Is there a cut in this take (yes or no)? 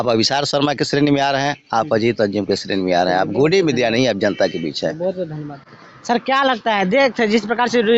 no